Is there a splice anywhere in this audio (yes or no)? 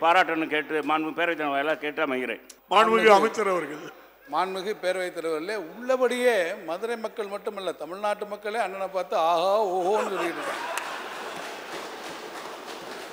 yes